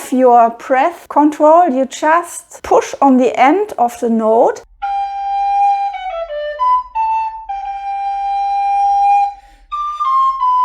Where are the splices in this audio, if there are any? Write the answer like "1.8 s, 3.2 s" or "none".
4.6 s